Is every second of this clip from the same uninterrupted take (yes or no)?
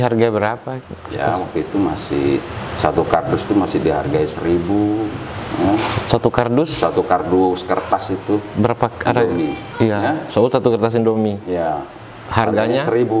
yes